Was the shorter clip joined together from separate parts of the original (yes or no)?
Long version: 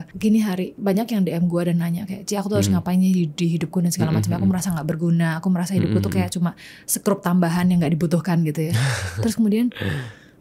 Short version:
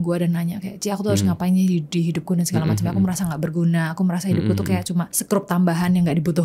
yes